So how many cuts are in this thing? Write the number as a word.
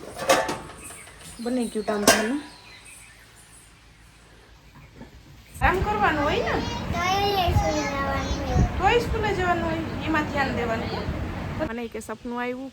two